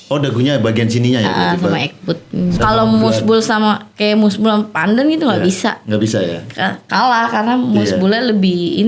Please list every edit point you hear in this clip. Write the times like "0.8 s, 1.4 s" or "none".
2.6 s